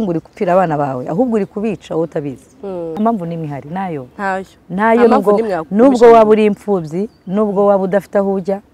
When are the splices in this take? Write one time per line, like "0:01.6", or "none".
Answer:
0:03.0